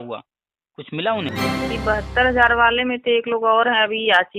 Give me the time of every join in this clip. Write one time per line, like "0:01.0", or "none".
0:01.3